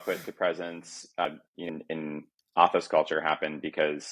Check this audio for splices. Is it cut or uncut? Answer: cut